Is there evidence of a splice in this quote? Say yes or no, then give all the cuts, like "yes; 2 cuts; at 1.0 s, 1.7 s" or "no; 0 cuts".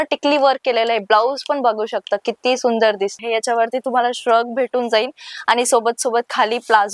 yes; 1 cut; at 3.2 s